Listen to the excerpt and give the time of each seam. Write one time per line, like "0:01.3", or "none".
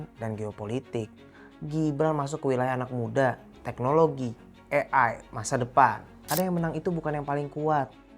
0:06.2